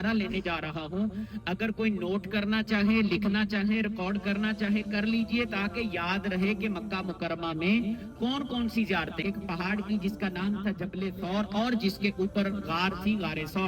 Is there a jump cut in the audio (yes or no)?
yes